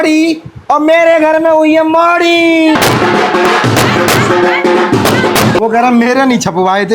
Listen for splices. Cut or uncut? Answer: cut